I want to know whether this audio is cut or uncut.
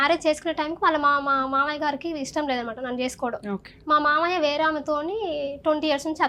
uncut